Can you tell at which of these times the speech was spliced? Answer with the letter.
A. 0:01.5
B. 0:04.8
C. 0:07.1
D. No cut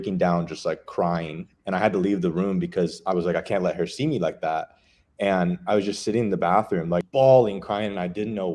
C